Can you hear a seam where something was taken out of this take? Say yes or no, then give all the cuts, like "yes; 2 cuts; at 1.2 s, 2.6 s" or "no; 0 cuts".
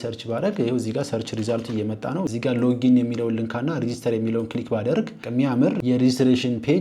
yes; 1 cut; at 2.3 s